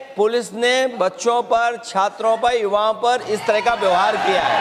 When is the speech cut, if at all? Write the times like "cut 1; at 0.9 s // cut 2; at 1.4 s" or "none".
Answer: none